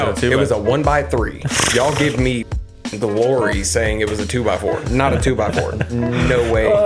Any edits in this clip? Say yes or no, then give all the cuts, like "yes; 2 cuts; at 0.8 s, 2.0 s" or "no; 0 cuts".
no; 0 cuts